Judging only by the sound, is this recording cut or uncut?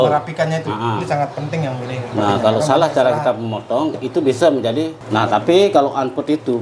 cut